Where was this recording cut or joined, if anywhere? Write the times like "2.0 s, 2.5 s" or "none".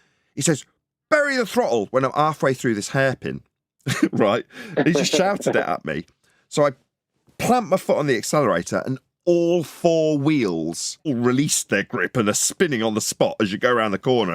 11.1 s